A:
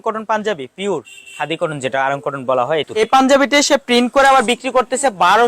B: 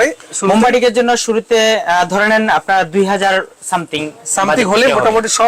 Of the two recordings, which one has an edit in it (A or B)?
A